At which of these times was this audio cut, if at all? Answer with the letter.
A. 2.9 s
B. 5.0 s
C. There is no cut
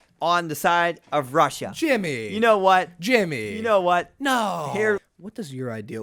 B